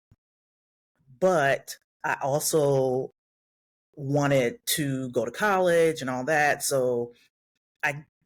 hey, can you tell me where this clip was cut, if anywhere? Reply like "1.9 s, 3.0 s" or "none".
none